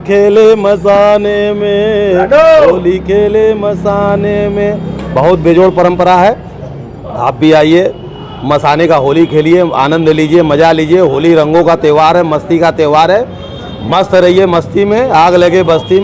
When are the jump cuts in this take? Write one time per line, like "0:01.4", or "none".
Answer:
none